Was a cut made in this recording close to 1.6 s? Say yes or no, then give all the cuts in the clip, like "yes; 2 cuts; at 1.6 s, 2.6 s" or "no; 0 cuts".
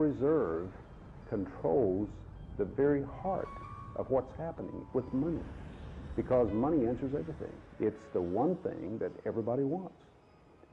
yes; 1 cut; at 1.6 s